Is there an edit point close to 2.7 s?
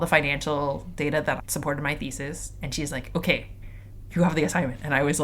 no; 1 cut; at 1.4 s

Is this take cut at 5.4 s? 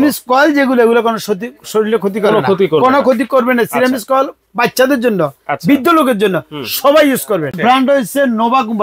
no; 1 cut; at 7.6 s

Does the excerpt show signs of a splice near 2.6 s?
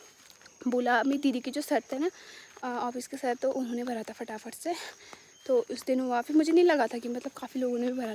no; 0 cuts

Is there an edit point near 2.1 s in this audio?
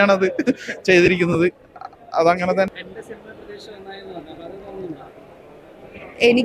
no; 0 cuts

